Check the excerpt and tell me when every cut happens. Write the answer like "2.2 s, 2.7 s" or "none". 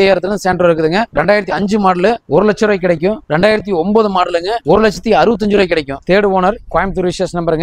1.1 s, 2.2 s, 3.2 s, 4.5 s, 6.0 s